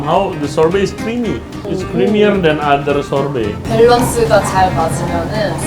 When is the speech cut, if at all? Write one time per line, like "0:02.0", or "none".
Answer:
0:01.6
0:03.6